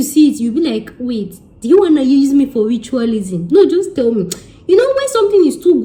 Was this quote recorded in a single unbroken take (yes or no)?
yes